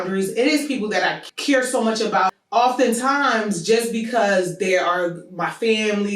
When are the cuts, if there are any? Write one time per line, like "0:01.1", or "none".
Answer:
0:01.3
0:02.3